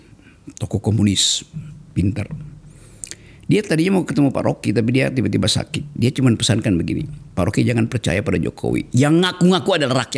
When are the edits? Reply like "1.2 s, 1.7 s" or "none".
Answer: none